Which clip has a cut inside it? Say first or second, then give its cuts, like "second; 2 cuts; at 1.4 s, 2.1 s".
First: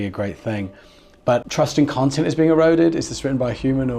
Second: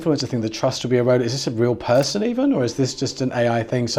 first; 1 cut; at 1.5 s